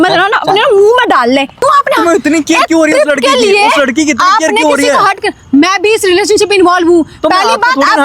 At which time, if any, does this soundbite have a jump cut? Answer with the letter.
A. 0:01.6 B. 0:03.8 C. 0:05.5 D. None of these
A